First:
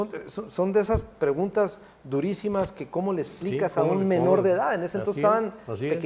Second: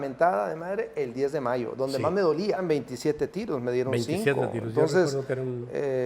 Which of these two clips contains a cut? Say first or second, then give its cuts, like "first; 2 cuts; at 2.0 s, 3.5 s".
second; 1 cut; at 2.6 s